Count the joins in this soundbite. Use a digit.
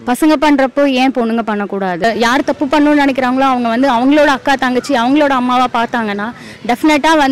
1